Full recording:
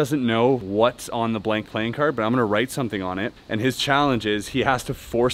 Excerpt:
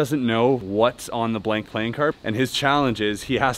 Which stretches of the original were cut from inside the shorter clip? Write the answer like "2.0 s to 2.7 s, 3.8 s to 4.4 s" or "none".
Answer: 2.2 s to 3.4 s